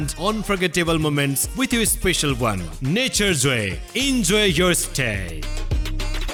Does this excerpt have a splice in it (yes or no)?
no